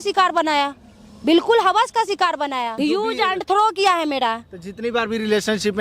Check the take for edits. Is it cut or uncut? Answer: cut